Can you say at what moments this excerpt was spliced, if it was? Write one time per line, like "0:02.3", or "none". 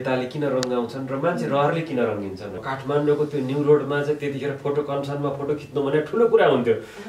0:02.6